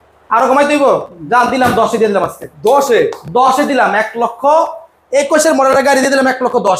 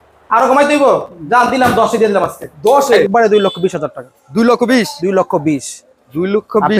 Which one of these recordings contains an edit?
second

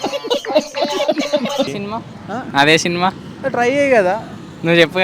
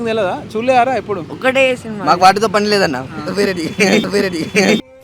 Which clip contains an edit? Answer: first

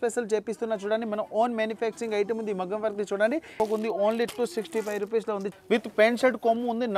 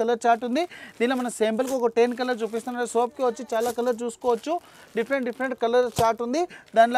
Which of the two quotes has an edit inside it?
first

